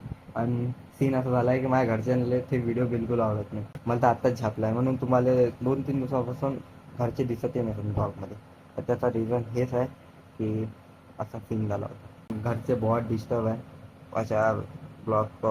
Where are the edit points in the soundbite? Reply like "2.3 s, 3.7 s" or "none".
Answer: 3.7 s, 12.3 s